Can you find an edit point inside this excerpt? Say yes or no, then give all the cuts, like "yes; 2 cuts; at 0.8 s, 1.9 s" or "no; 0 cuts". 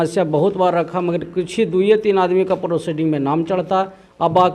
no; 0 cuts